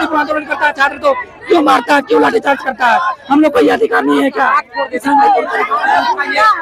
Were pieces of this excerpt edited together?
no; 0 cuts

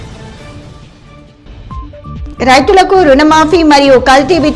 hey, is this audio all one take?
no; 1 cut; at 2.2 s

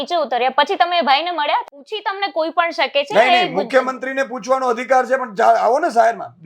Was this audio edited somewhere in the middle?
yes; 1 cut; at 1.8 s

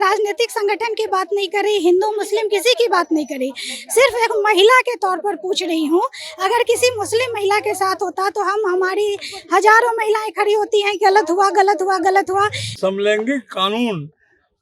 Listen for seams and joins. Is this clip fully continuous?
no; 1 cut; at 12.6 s

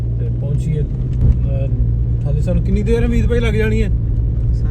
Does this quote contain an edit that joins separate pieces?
no; 0 cuts

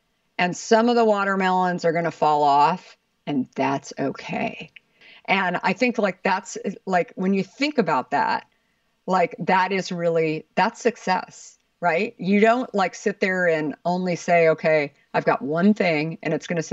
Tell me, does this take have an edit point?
yes; 1 cut; at 4.9 s

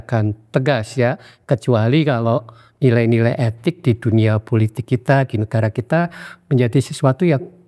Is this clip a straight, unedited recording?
yes; 0 cuts

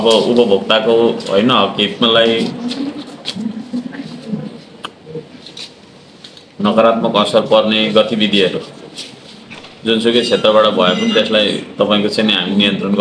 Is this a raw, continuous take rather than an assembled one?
yes; 0 cuts

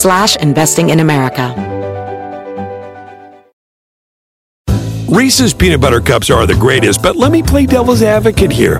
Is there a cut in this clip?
yes; 1 cut; at 1.5 s

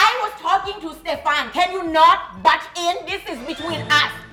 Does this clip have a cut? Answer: no; 0 cuts

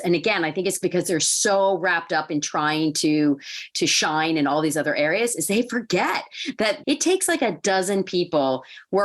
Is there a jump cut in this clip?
yes; 1 cut; at 6.8 s

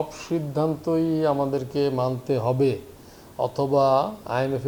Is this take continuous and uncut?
yes; 0 cuts

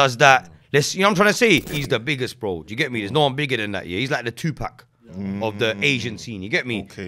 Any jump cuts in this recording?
yes; 1 cut; at 1.7 s

